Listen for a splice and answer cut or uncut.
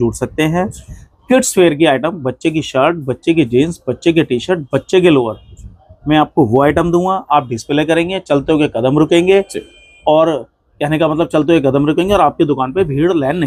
uncut